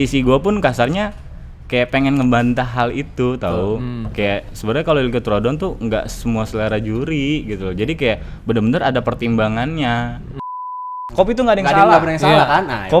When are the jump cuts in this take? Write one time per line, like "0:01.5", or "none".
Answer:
0:10.8